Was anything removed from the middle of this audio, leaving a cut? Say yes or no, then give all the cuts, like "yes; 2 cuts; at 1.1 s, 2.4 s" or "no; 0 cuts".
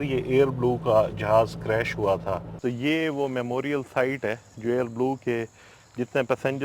yes; 1 cut; at 2.5 s